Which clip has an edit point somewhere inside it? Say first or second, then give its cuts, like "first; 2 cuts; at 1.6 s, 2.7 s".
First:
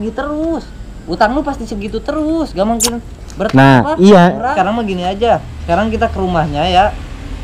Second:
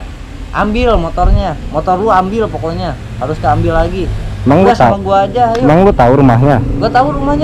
first; 1 cut; at 4.5 s